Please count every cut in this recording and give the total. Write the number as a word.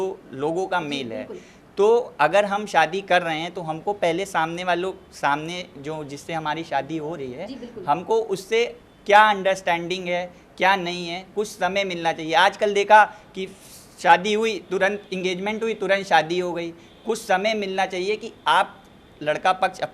zero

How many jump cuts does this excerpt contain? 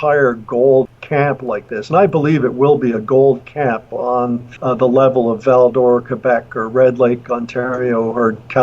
two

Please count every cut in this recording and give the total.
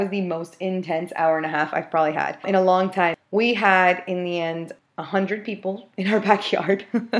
zero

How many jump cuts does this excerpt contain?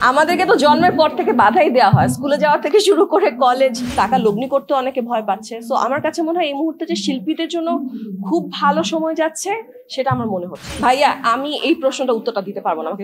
two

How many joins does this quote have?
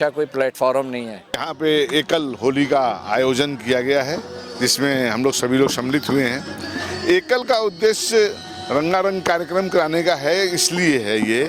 one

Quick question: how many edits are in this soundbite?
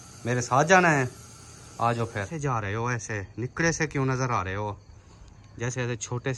one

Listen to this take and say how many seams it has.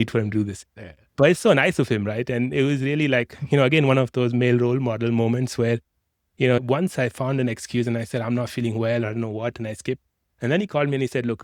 one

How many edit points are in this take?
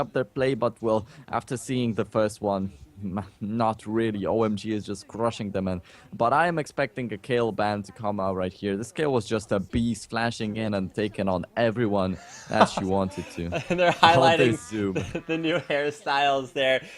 one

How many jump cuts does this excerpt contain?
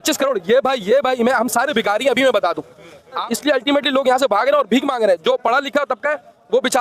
one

